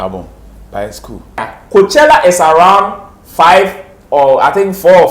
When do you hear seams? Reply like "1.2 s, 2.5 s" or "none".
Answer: 1.5 s